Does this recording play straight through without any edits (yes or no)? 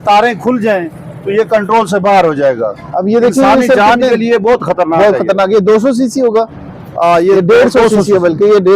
yes